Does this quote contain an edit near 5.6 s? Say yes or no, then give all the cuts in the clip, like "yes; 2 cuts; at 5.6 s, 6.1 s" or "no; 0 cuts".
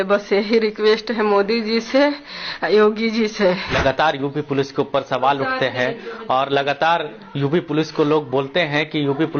no; 1 cut; at 3.7 s